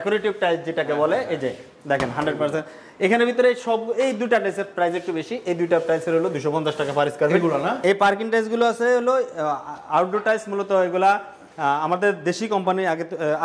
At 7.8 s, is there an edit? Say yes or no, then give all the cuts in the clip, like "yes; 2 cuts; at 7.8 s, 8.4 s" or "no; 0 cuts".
yes; 1 cut; at 7.8 s